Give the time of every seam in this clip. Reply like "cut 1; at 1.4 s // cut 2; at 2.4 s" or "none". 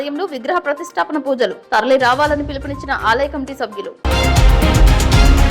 cut 1; at 4.1 s